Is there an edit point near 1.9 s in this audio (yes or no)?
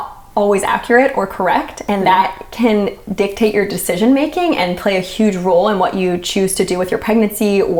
no